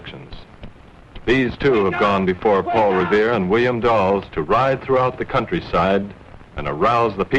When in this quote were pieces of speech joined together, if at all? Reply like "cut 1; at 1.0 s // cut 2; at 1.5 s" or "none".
cut 1; at 4.0 s